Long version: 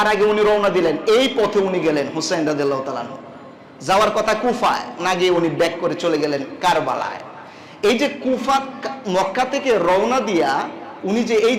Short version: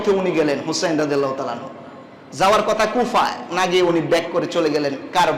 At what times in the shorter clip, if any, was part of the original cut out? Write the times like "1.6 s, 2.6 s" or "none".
none